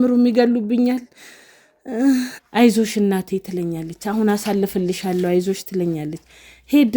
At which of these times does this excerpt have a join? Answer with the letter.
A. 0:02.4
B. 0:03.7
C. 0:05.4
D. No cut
A